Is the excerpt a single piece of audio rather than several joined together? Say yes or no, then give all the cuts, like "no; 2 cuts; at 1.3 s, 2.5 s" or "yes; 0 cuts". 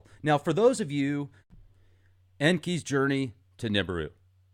yes; 0 cuts